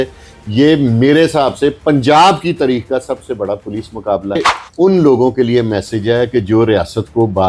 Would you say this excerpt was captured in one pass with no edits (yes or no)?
no